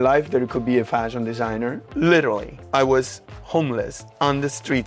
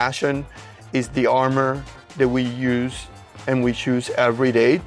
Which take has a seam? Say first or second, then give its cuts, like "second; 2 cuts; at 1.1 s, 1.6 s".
first; 3 cuts; at 1.9 s, 2.5 s, 4.0 s